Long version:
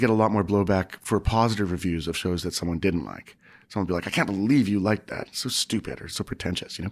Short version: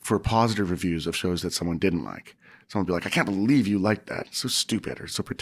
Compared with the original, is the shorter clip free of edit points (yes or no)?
yes